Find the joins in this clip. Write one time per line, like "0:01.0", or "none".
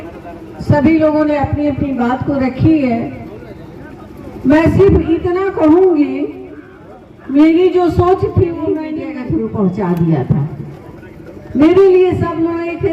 0:08.9